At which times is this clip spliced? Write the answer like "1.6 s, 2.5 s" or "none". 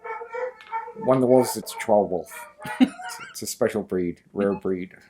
1.7 s